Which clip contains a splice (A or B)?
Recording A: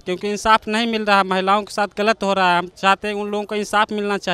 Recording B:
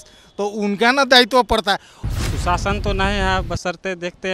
B